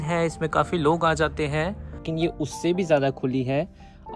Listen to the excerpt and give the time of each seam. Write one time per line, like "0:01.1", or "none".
0:02.1